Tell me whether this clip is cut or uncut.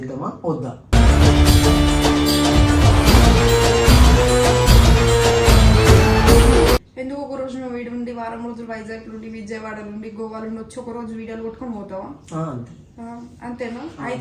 cut